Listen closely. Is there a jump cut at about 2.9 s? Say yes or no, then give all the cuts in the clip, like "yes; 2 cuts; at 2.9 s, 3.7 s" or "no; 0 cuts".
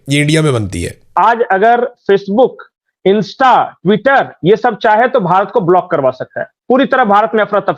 no; 1 cut; at 1.1 s